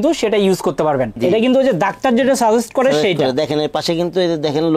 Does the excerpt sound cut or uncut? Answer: cut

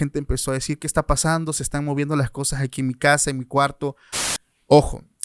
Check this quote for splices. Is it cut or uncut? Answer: cut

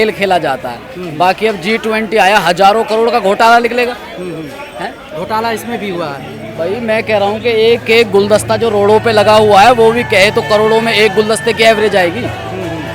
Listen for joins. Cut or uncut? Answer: uncut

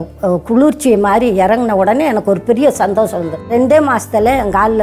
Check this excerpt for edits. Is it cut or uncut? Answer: cut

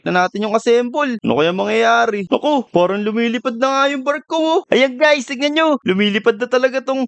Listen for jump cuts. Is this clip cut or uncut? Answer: uncut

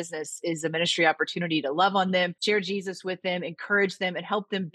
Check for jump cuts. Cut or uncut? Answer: cut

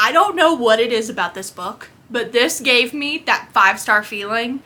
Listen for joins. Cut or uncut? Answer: uncut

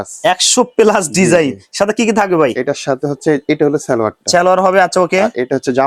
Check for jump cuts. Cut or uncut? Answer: uncut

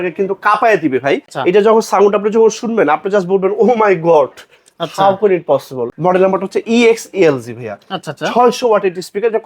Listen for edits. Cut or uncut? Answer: cut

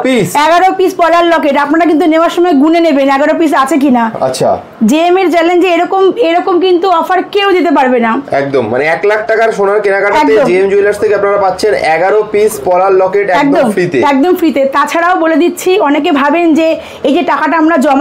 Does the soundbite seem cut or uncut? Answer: uncut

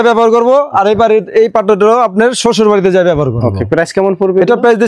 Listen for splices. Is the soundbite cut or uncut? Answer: uncut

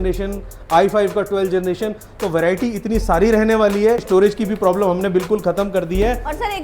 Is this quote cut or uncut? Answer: cut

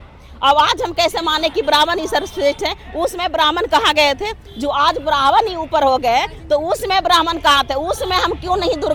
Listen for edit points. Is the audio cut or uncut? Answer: uncut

